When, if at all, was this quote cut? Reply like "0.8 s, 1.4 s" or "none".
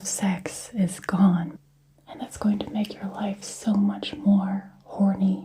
1.5 s